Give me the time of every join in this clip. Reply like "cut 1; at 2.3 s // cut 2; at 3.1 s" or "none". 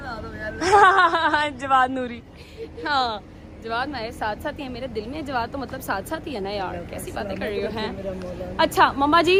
none